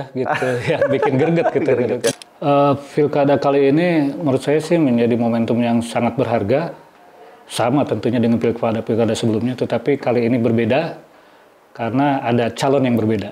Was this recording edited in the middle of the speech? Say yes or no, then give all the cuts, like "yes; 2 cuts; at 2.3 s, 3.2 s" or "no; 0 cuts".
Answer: yes; 1 cut; at 2.1 s